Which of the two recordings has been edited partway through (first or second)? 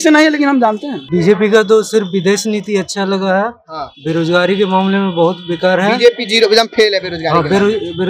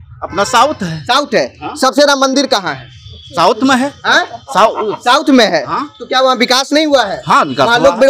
first